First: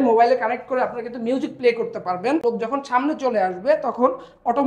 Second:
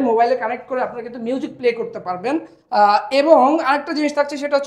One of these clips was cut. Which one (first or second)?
first